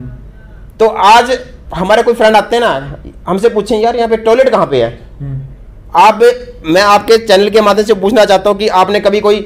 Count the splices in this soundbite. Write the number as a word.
zero